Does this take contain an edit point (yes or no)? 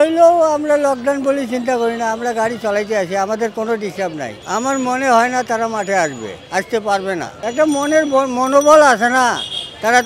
no